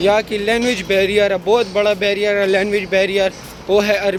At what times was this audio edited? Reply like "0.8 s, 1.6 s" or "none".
none